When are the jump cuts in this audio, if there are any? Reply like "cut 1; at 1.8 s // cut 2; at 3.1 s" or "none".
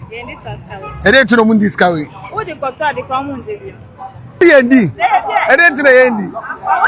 cut 1; at 4.4 s

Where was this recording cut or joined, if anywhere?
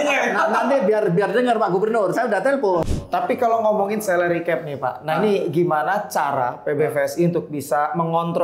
cut 1; at 2.9 s

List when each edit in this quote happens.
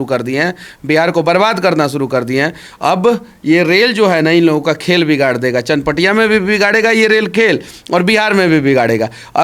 none

